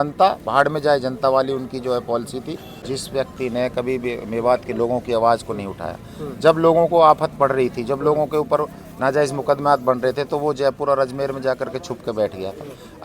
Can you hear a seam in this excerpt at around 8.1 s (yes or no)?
no